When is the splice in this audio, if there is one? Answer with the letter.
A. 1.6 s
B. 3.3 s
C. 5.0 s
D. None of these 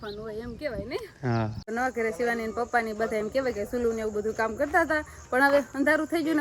A